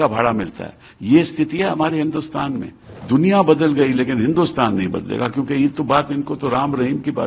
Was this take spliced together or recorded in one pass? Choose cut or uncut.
cut